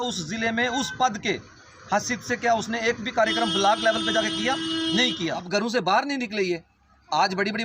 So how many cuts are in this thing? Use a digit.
1